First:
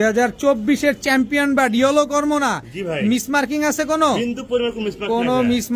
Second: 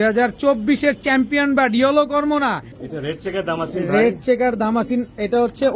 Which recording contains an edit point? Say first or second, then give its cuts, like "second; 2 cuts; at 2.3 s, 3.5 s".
second; 1 cut; at 2.8 s